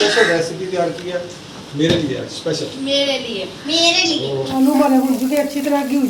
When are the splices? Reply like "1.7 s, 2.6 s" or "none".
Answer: 4.6 s